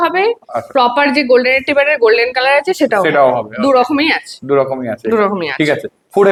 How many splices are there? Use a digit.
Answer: 0